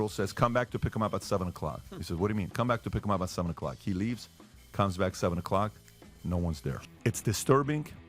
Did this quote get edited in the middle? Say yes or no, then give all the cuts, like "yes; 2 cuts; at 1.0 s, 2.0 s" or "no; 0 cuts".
yes; 1 cut; at 6.8 s